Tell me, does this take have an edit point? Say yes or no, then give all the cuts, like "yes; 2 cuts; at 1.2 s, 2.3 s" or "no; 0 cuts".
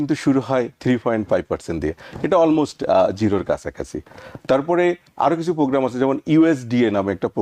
no; 0 cuts